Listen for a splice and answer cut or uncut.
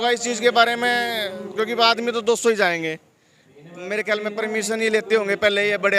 uncut